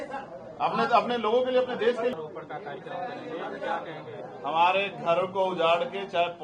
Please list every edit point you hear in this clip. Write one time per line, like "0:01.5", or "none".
0:02.1